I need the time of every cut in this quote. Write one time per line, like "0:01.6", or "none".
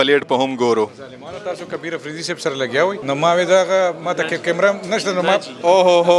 0:03.0